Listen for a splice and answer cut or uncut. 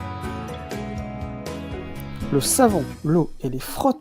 cut